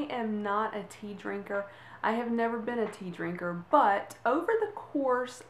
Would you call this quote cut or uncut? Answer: cut